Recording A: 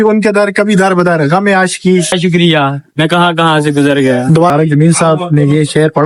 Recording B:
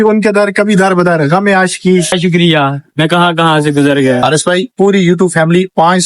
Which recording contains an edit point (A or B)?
B